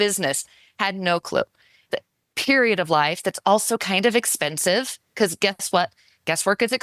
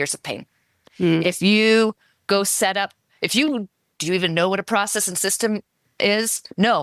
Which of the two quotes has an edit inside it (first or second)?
first